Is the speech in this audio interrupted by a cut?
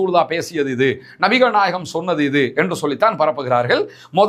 no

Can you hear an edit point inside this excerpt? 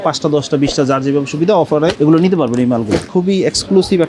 yes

